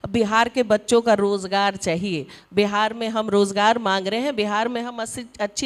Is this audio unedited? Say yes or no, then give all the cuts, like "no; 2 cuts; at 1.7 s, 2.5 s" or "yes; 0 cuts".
yes; 0 cuts